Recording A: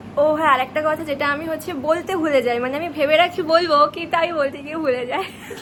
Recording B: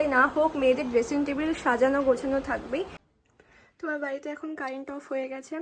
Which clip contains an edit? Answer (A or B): B